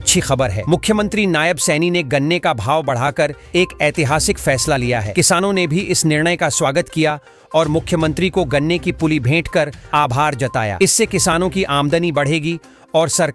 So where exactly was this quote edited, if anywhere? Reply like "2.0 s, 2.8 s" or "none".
none